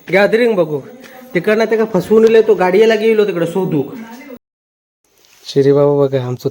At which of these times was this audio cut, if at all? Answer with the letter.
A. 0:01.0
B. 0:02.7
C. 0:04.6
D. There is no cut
C